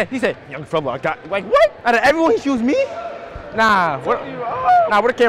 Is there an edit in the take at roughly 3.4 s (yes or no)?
no